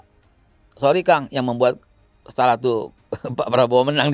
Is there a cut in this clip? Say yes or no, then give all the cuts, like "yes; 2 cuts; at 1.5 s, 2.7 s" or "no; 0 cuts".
no; 0 cuts